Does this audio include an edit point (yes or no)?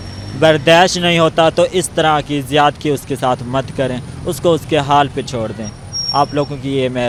no